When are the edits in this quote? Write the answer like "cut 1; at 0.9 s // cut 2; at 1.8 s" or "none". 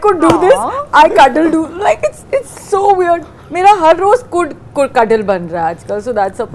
none